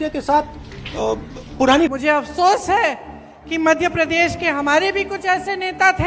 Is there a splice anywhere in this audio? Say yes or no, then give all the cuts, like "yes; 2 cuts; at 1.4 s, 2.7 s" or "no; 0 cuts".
yes; 1 cut; at 1.9 s